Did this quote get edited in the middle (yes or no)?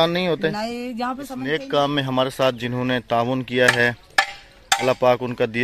yes